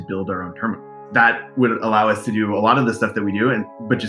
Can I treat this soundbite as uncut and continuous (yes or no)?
no